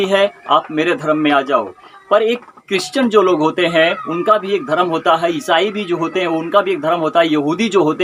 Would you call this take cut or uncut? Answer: uncut